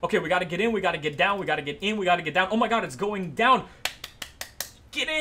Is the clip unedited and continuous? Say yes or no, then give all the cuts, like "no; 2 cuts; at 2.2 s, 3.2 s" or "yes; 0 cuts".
yes; 0 cuts